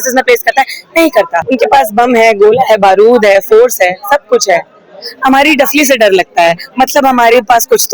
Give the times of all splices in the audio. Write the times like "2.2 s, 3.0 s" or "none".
1.4 s